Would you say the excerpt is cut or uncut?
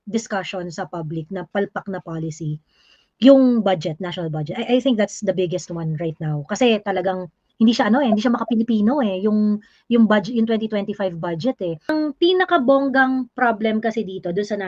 cut